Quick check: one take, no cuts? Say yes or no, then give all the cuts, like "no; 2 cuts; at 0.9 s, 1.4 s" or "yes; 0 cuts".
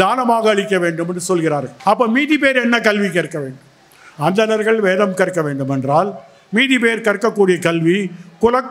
no; 1 cut; at 1.7 s